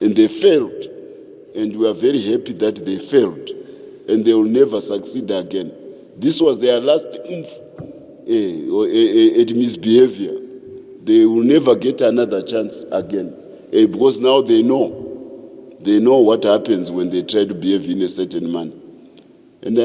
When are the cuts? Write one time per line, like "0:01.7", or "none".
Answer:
none